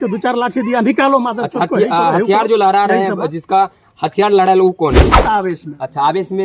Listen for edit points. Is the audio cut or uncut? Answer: cut